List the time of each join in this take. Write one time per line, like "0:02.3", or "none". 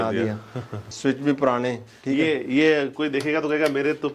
0:00.9